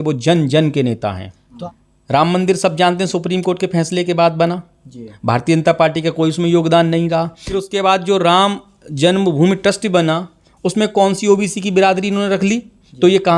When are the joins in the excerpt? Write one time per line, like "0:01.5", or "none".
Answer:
0:01.5
0:07.4